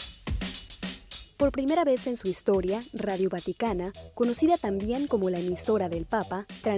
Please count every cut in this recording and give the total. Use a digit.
1